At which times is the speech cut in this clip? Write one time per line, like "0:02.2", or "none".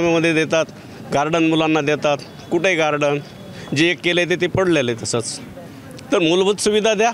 none